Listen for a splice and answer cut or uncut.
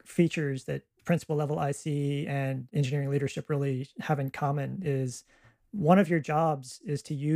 uncut